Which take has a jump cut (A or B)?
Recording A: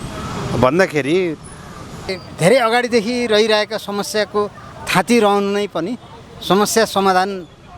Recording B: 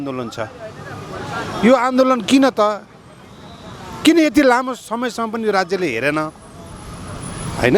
A